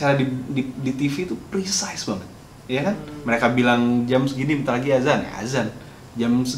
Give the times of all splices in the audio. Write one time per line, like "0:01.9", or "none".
none